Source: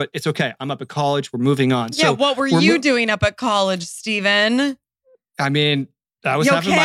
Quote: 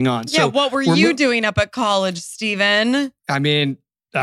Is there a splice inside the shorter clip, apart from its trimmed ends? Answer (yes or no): yes